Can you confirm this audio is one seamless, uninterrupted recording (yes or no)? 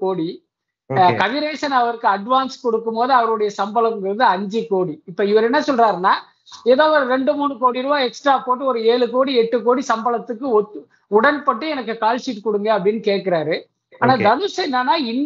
yes